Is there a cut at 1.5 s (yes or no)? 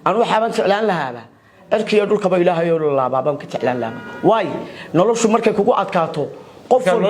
no